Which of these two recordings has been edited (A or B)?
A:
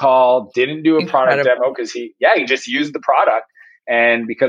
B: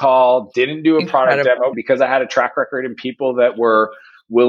B